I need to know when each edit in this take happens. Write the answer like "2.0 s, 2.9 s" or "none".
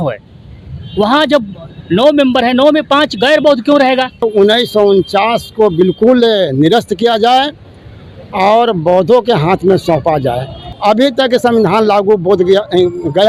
4.2 s, 10.7 s

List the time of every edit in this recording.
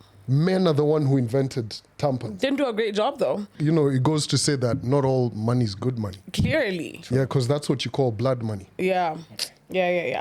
3.5 s

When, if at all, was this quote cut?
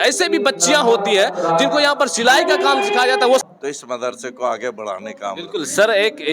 3.4 s

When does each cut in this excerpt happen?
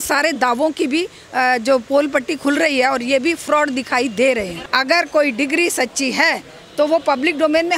4.7 s

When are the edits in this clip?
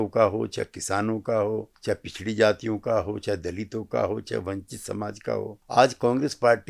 1.7 s, 5.6 s

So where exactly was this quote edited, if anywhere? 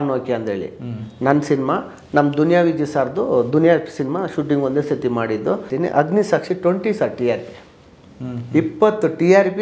5.7 s

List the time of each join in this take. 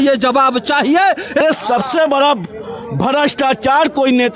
1.4 s

